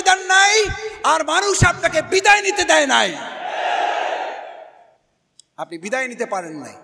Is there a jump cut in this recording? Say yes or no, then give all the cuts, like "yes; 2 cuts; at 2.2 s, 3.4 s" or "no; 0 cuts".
no; 0 cuts